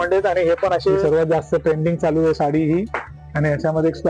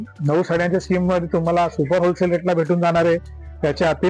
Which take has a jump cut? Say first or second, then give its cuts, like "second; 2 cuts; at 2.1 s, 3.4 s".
first; 1 cut; at 1.0 s